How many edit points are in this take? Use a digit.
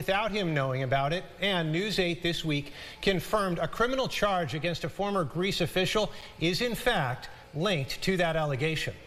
0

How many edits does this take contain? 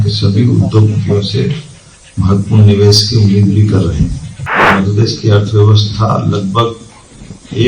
1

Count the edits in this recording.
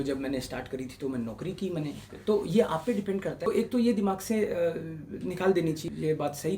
2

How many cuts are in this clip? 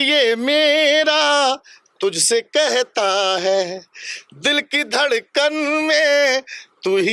0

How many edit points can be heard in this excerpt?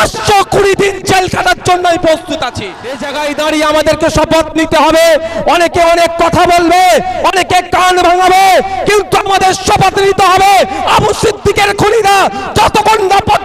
1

